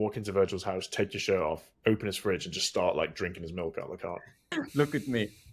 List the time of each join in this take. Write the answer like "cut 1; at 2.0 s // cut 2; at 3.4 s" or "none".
cut 1; at 4.5 s